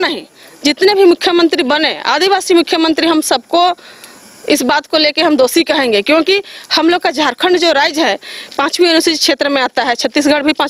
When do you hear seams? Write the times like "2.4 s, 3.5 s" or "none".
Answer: none